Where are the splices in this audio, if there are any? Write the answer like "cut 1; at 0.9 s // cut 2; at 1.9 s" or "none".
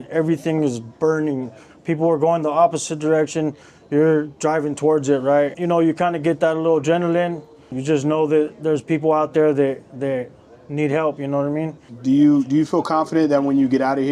cut 1; at 5.6 s // cut 2; at 7.8 s // cut 3; at 11.9 s